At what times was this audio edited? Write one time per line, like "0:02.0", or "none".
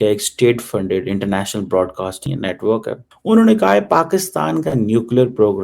0:02.3